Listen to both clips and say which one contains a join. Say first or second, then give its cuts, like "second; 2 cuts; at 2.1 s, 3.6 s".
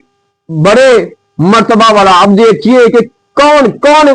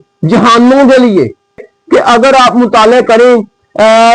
second; 1 cut; at 1.7 s